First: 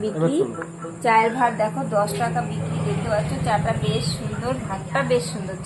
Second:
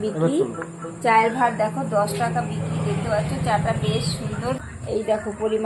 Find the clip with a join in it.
second; 1 cut; at 4.6 s

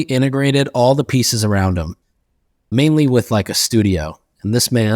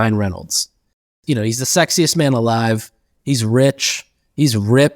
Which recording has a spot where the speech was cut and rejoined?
second; 1 cut; at 1.2 s

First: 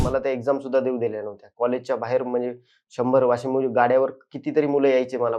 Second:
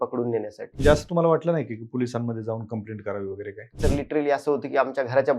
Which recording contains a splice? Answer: second; 2 cuts; at 0.8 s, 3.7 s

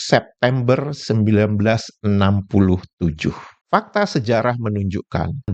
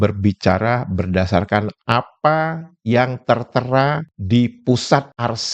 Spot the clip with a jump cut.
first; 1 cut; at 3.6 s

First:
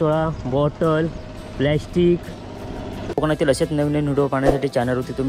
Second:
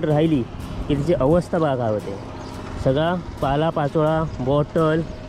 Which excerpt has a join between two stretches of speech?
first; 1 cut; at 3.0 s

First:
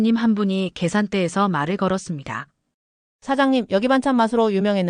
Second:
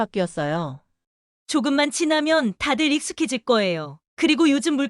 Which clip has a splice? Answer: second; 1 cut; at 1.3 s

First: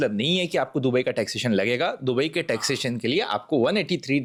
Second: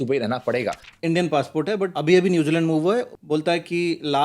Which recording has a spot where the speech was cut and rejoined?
second; 3 cuts; at 0.9 s, 1.9 s, 3.2 s

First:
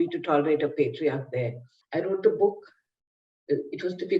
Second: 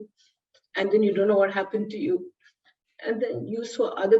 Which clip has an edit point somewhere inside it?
first; 1 cut; at 1.7 s

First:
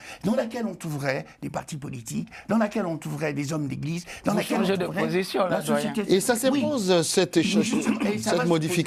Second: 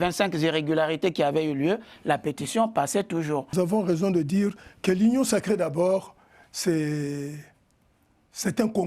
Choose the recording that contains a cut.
second; 1 cut; at 3.5 s

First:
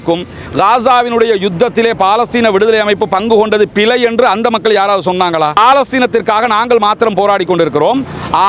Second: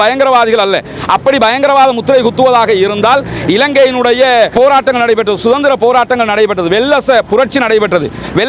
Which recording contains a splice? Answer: first; 1 cut; at 5.6 s

